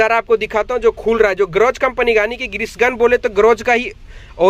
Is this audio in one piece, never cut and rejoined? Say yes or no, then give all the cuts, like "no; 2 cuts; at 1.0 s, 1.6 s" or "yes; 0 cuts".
yes; 0 cuts